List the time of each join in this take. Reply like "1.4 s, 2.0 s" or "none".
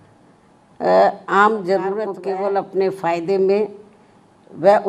2.1 s